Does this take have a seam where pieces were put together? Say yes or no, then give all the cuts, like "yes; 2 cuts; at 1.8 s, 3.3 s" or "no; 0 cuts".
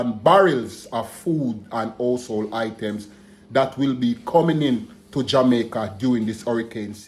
no; 0 cuts